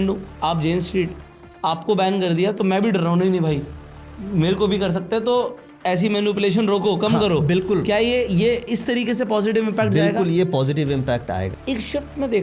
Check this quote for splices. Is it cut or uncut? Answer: cut